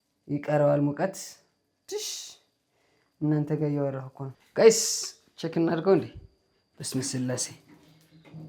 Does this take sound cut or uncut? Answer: cut